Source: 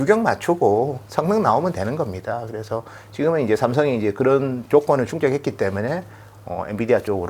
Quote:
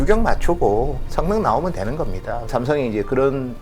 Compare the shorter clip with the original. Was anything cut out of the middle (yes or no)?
yes